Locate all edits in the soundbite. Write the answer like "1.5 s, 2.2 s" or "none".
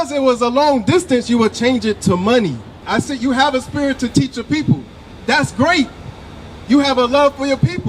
2.8 s

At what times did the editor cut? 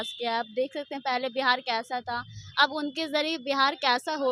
none

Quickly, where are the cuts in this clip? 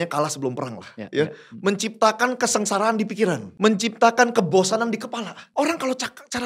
3.5 s, 5.4 s

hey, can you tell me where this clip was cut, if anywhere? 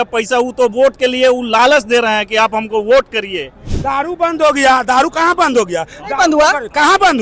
3.7 s

